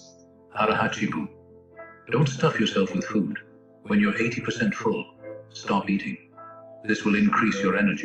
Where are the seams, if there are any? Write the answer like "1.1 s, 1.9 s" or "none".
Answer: none